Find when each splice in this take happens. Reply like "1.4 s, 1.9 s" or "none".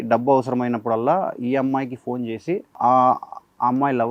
none